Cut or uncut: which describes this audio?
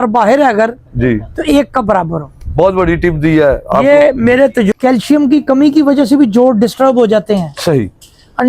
cut